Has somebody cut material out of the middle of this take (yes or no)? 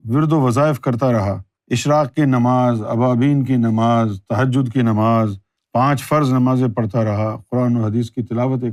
no